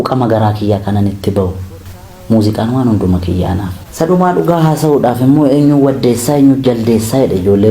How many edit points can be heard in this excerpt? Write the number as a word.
one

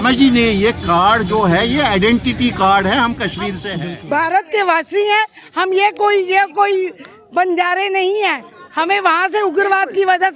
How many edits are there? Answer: one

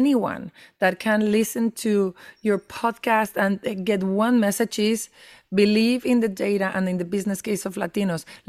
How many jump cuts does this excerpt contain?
zero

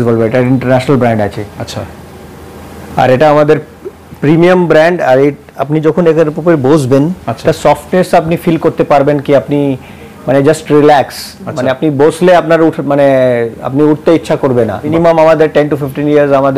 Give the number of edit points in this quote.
one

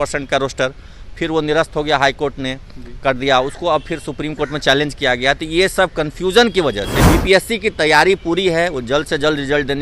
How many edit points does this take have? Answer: one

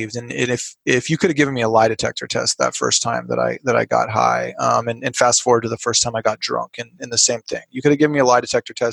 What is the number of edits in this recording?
zero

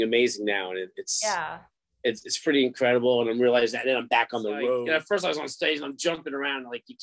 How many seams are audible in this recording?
one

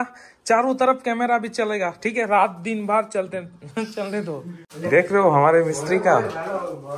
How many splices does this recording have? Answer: one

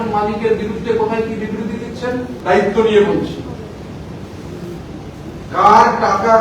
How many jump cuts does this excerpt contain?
one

